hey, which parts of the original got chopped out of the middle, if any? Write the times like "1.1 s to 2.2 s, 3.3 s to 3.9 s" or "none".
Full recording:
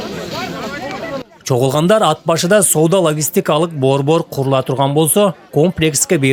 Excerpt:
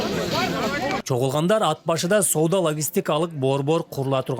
1.0 s to 1.4 s